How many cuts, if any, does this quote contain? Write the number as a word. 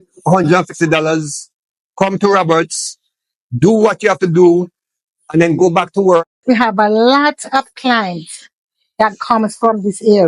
one